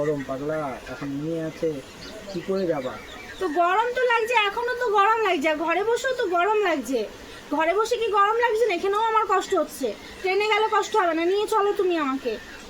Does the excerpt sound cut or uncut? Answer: cut